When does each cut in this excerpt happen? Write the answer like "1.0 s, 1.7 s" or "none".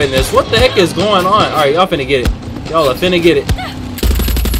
none

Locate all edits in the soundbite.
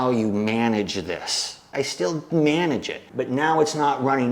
1.6 s

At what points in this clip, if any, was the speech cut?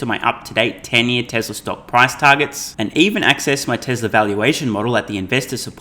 none

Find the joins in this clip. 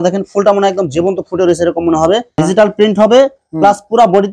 2.3 s

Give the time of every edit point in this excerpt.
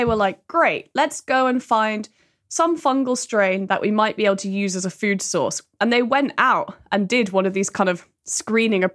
none

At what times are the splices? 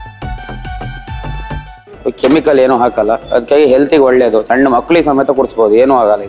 2.0 s

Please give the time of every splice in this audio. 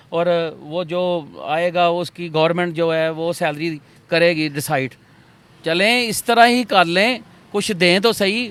none

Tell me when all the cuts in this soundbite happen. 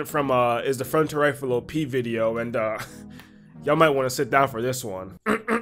none

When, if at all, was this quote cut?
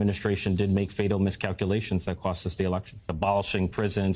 3.1 s

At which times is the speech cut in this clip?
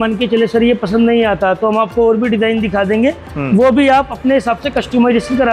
none

